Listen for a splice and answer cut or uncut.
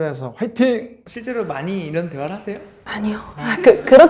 cut